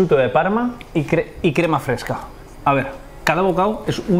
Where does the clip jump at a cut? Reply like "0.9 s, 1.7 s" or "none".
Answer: 3.0 s